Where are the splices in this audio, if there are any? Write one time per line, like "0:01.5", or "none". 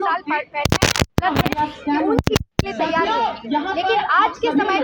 0:01.1
0:02.5